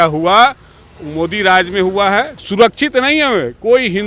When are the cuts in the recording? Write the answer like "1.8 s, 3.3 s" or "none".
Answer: 2.4 s